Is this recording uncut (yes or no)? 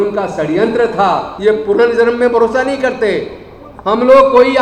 no